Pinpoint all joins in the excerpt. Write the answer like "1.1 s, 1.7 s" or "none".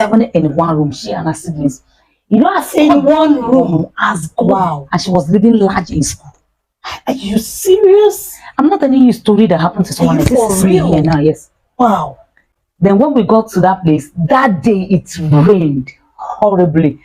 none